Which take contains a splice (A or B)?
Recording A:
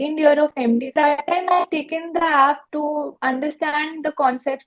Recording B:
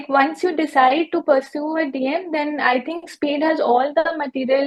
A